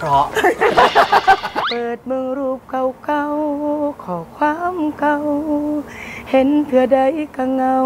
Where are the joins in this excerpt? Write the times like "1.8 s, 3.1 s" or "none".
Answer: none